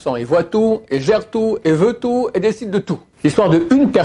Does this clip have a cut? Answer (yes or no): yes